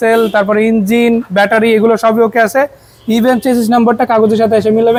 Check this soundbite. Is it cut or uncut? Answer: uncut